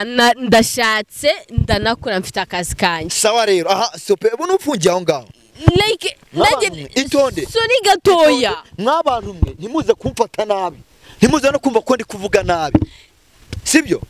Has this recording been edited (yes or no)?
no